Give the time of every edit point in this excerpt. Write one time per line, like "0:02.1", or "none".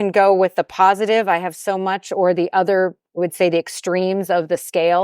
0:03.2